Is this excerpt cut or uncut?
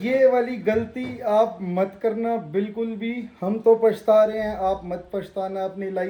uncut